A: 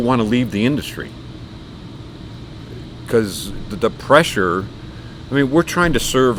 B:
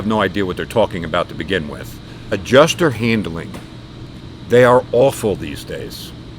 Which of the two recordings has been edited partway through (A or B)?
B